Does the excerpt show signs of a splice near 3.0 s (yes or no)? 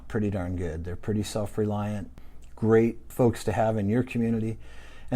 yes